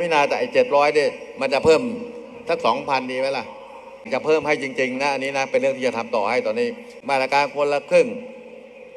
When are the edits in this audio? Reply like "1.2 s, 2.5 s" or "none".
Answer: 4.1 s, 6.9 s